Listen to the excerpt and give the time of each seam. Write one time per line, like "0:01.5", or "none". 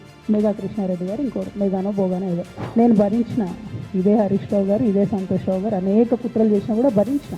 0:02.5